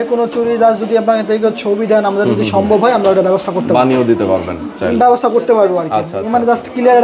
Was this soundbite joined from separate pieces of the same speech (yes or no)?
no